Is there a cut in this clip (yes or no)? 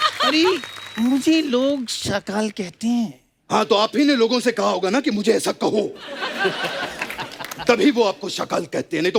no